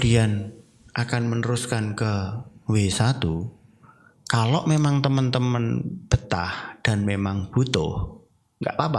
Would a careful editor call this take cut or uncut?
uncut